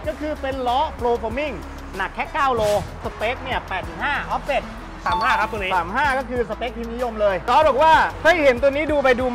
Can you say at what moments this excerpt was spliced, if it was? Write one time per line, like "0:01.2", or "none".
0:02.9
0:07.4